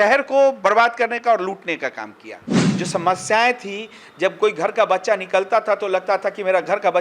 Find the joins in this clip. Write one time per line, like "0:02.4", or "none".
0:02.6